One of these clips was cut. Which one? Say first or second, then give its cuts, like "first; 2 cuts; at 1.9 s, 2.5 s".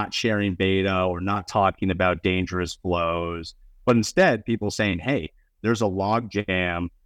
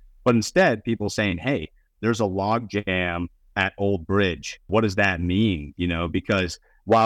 second; 1 cut; at 4.7 s